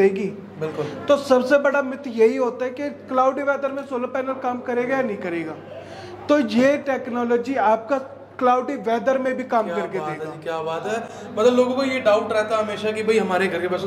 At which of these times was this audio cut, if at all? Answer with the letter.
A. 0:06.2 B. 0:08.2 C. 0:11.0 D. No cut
D